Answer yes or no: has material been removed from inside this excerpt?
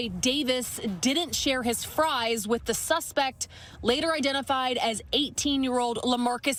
no